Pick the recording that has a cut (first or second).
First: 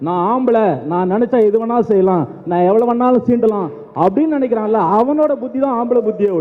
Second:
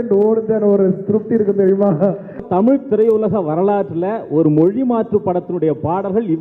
second